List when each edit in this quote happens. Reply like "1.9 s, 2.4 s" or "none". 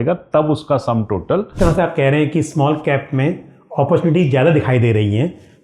1.5 s

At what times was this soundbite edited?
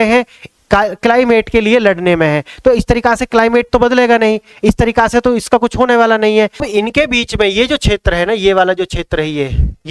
6.6 s

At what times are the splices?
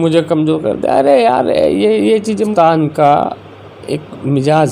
2.5 s

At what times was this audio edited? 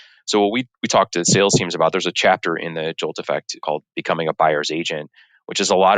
3.6 s

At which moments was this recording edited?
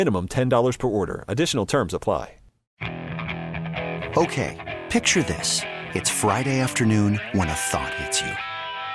2.6 s

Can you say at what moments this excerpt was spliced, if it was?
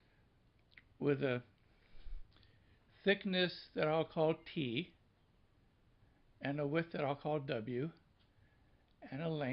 2.9 s

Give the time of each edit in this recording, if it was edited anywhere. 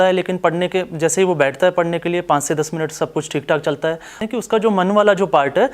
4.2 s

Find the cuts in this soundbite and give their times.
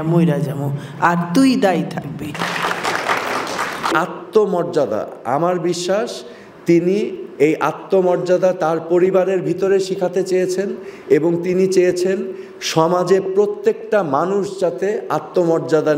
2.3 s, 3.9 s

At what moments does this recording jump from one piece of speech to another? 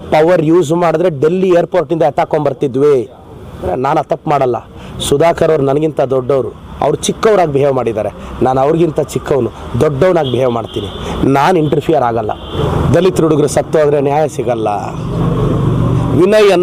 3.7 s, 12.6 s

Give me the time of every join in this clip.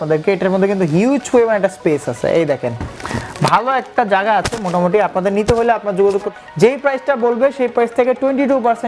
6.3 s

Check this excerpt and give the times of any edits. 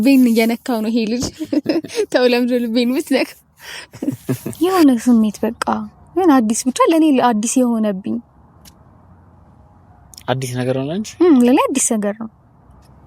4.5 s

